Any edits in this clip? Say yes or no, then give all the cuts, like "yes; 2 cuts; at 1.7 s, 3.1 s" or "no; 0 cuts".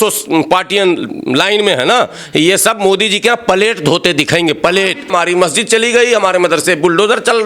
yes; 1 cut; at 5.1 s